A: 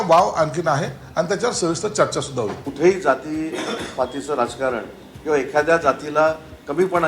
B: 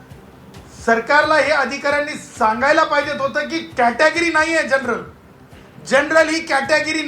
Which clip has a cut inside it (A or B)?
A